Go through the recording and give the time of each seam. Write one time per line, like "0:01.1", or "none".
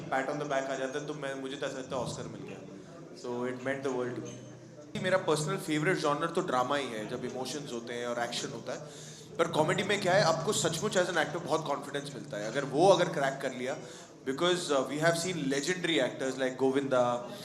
none

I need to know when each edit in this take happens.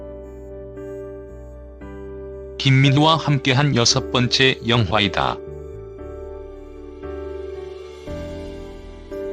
none

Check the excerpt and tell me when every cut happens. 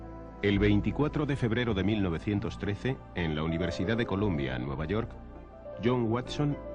none

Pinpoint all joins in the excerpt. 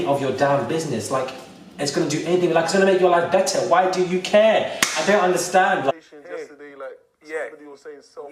0:05.9

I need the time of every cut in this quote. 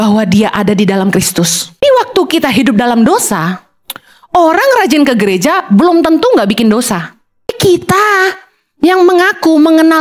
0:01.8
0:07.6

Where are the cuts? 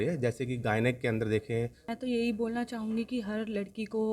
0:01.9

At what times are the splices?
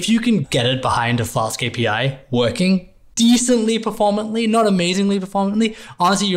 none

